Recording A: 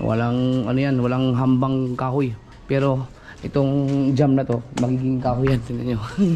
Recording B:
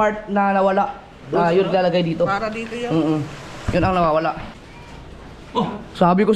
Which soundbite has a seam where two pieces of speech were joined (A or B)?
B